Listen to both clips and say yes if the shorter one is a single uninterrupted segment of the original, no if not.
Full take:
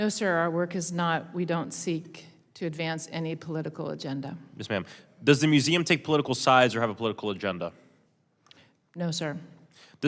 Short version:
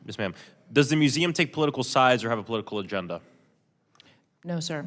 yes